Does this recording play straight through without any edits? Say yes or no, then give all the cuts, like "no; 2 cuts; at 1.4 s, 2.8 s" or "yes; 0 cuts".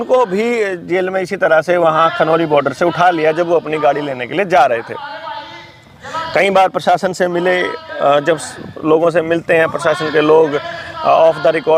yes; 0 cuts